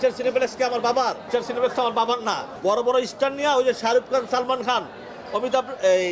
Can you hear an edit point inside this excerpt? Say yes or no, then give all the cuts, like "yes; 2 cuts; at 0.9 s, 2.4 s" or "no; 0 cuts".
yes; 2 cuts; at 1.2 s, 2.5 s